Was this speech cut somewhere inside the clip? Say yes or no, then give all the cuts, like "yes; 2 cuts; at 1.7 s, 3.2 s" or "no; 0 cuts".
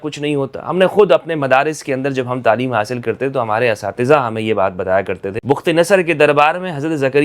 yes; 1 cut; at 5.3 s